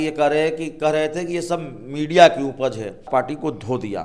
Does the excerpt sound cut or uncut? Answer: cut